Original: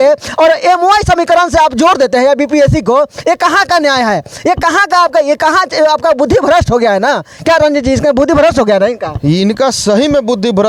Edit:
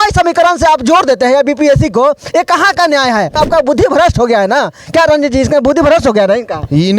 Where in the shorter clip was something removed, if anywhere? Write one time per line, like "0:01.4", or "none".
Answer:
0:03.4

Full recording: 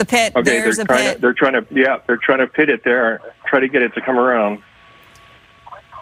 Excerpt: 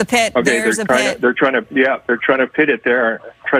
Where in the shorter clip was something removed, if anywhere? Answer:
none

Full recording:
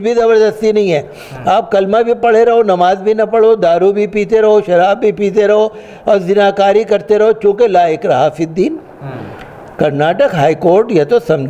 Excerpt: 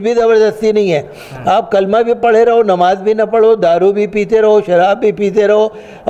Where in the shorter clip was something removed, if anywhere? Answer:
none

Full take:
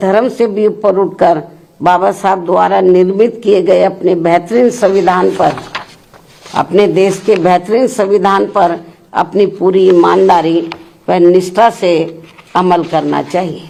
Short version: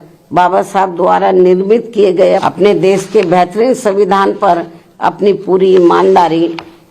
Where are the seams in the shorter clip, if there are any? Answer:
0:02.4

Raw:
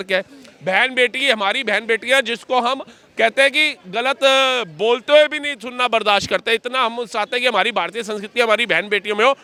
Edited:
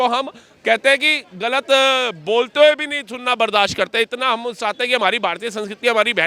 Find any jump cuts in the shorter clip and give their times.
none

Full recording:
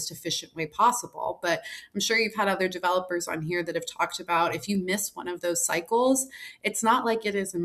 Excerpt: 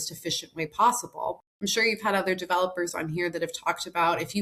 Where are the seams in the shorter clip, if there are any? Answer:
0:01.4

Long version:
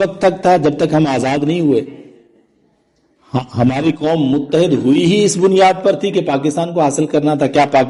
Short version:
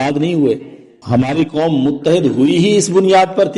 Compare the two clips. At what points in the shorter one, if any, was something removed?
0:01.0

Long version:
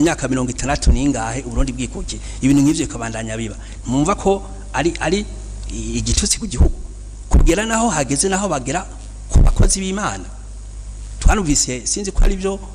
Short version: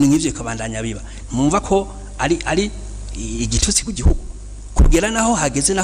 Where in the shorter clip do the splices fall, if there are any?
none

